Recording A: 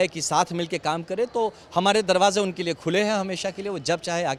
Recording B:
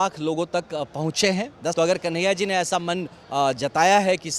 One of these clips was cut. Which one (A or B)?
B